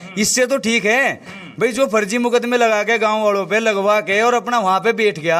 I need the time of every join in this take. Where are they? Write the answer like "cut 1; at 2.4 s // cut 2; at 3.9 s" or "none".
none